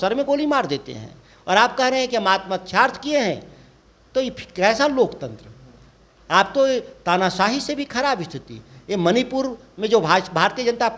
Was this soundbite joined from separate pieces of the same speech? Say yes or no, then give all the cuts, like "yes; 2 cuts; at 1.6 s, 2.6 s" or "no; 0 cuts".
no; 0 cuts